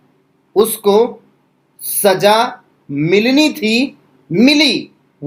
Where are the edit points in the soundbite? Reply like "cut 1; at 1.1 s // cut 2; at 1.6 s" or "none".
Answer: none